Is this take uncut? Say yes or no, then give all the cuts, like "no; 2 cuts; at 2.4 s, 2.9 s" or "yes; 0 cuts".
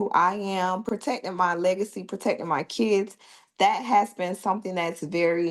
no; 1 cut; at 0.9 s